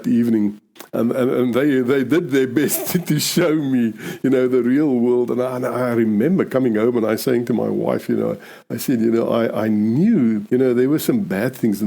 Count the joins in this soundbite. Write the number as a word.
one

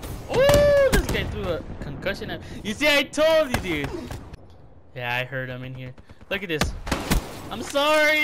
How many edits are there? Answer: one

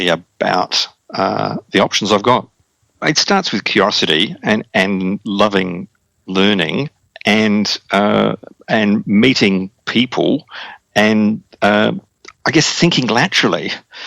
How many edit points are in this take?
one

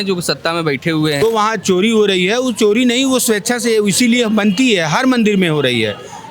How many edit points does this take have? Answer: one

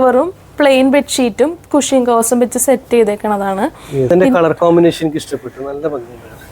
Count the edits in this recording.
one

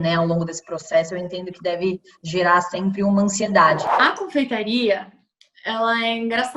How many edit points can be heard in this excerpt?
one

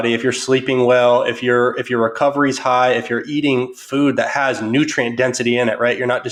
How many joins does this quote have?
zero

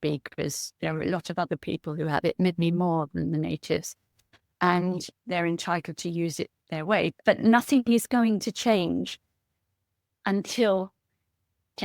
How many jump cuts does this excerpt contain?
one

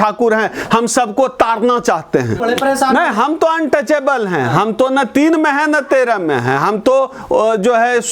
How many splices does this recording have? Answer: one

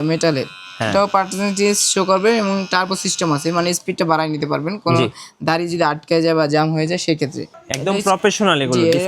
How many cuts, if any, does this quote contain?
one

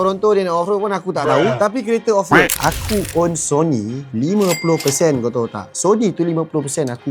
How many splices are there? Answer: one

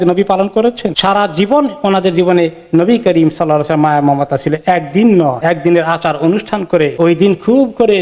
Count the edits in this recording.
zero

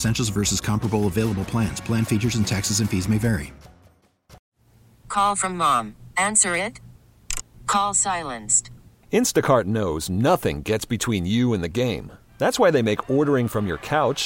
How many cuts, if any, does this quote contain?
one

